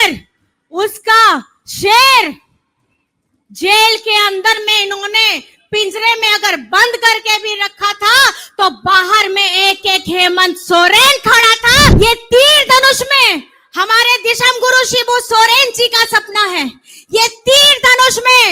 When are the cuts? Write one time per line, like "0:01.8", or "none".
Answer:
0:11.9